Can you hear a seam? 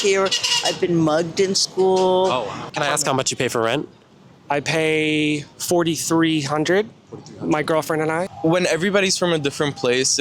yes; 3 cuts; at 2.6 s, 5.5 s, 8.3 s

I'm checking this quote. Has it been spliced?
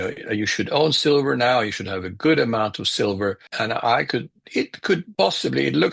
yes; 2 cuts; at 3.5 s, 5.1 s

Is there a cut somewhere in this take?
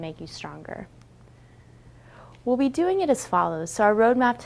no; 0 cuts

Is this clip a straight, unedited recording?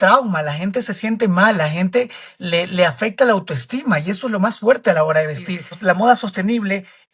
no; 1 cut; at 5.7 s

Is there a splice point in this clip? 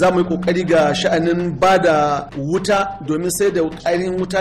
yes; 1 cut; at 2.3 s

